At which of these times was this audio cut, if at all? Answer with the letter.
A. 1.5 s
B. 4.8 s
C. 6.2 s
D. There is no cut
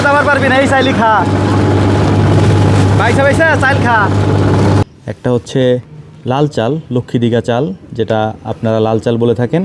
B